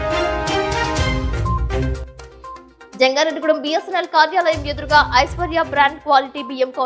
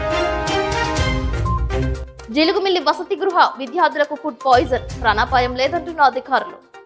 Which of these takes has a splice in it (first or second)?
first